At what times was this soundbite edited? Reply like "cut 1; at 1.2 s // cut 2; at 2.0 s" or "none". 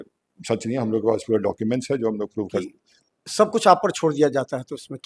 cut 1; at 2.7 s

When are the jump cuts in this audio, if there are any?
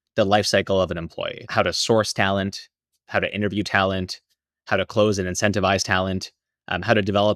cut 1; at 1.4 s

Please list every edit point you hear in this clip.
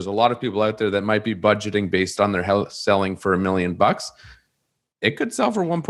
none

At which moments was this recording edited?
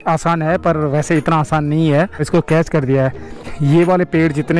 cut 1; at 2.3 s // cut 2; at 3.5 s

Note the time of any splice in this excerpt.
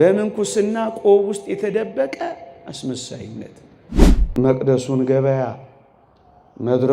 cut 1; at 4.0 s

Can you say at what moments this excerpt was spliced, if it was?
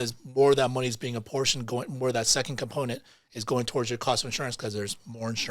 none

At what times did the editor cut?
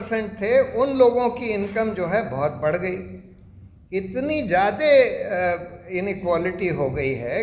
none

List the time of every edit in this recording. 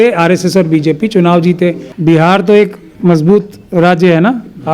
cut 1; at 1.9 s

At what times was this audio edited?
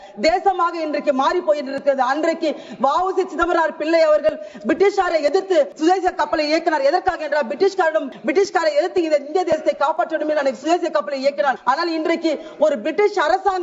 cut 1; at 5.7 s // cut 2; at 8.1 s // cut 3; at 11.6 s

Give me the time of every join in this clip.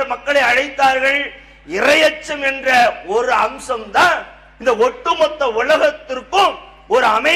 none

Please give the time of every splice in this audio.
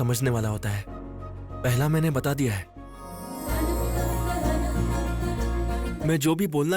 cut 1; at 3.2 s // cut 2; at 5.9 s

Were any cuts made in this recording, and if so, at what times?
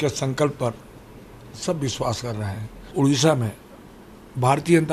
cut 1; at 2.9 s

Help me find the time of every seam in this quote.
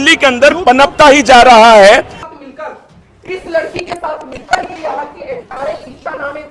cut 1; at 2.2 s

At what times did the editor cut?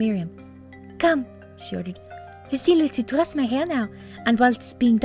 cut 1; at 1.2 s

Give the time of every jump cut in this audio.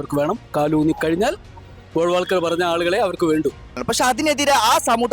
cut 1; at 3.9 s

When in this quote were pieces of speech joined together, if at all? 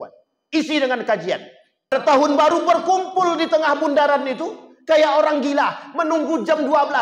cut 1; at 2.1 s

